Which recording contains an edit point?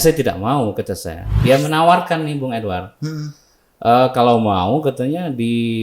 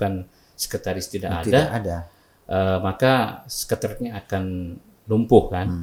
first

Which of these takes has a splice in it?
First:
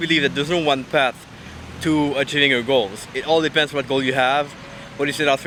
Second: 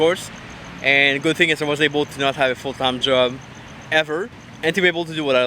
second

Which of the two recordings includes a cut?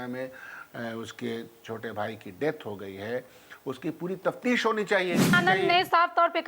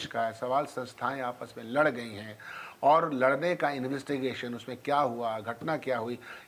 first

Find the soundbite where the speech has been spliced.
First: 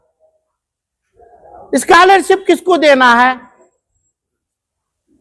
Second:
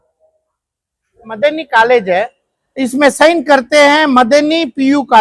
second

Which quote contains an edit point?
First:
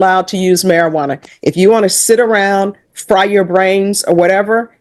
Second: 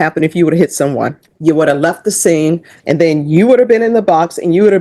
second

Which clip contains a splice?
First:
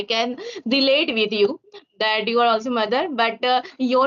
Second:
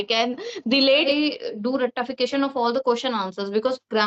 second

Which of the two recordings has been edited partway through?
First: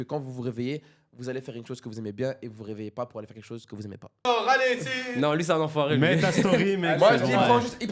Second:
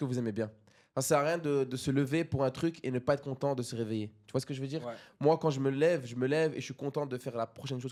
first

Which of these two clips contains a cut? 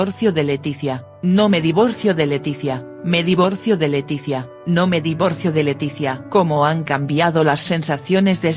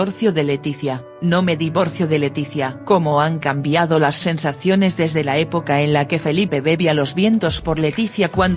second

